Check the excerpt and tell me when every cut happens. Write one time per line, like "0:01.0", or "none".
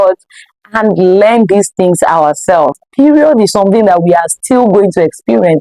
0:02.8